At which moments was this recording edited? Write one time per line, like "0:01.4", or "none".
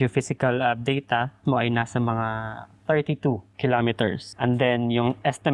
0:01.4
0:03.5
0:04.3